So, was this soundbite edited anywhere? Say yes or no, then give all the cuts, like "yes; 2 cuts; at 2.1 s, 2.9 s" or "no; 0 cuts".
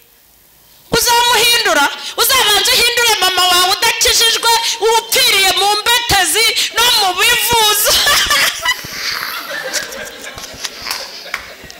no; 0 cuts